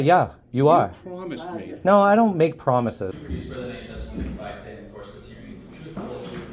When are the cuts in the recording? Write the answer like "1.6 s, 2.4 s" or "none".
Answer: 3.1 s